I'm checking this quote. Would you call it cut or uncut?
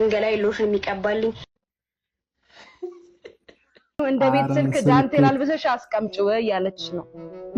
cut